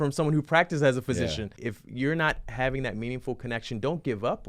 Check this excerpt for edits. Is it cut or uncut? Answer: cut